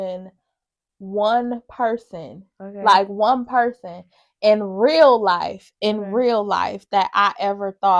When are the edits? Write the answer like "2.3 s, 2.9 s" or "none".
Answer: none